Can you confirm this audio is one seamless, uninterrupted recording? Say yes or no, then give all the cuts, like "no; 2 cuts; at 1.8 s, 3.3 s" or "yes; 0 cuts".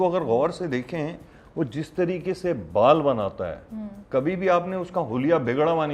yes; 0 cuts